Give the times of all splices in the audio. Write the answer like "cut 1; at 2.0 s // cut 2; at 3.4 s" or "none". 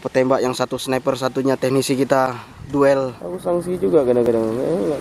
cut 1; at 3.2 s